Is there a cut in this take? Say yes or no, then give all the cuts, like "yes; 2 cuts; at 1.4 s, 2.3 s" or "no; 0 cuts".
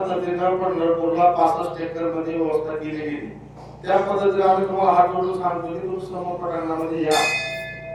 no; 0 cuts